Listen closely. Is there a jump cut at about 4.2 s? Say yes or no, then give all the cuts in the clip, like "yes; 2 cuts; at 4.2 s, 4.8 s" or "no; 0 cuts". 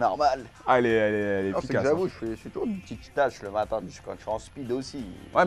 no; 1 cut; at 2.8 s